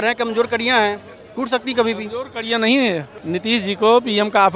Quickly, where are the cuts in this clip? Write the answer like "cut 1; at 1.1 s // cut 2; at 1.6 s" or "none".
cut 1; at 3.2 s